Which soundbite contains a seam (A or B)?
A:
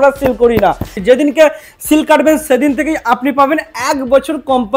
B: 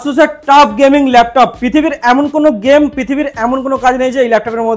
A